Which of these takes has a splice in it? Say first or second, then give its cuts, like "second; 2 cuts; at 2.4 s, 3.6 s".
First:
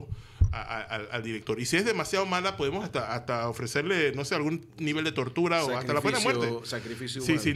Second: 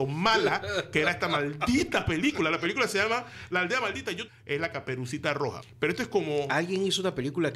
second; 2 cuts; at 4.2 s, 5.7 s